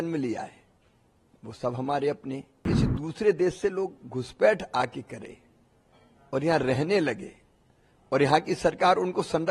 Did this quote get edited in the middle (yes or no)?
yes